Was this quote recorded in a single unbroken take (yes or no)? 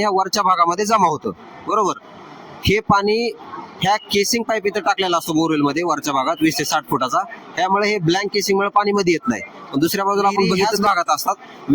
no